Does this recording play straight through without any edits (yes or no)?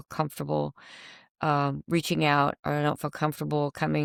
yes